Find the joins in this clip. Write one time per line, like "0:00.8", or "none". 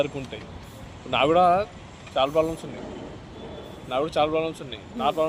none